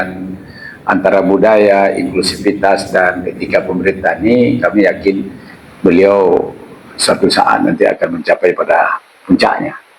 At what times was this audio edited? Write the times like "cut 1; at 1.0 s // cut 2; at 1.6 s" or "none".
none